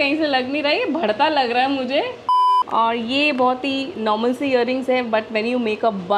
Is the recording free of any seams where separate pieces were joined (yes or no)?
no